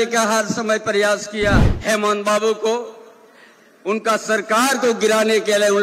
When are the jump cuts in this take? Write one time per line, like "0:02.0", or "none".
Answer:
0:01.7